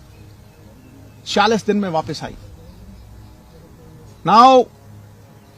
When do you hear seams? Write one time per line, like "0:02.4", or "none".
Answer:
none